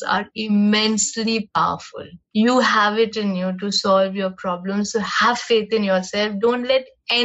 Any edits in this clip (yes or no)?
no